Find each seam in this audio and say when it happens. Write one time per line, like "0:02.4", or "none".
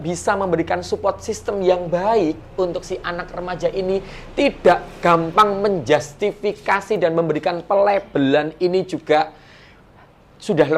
none